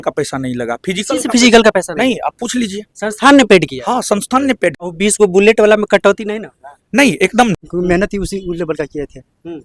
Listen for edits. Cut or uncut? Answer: cut